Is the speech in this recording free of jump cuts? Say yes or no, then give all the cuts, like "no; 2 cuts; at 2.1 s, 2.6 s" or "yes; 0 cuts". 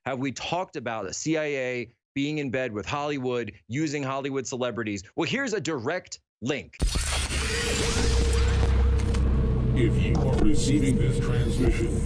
no; 1 cut; at 6.8 s